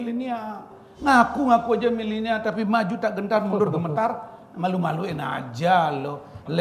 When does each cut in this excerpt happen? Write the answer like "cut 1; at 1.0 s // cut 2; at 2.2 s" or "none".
none

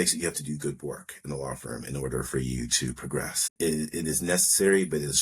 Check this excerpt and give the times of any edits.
cut 1; at 3.5 s

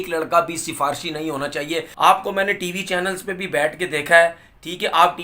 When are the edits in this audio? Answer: cut 1; at 1.9 s

